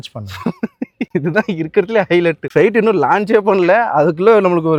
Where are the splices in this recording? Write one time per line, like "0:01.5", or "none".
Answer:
none